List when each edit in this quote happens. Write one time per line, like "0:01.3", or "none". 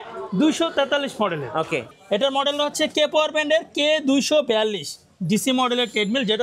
0:01.8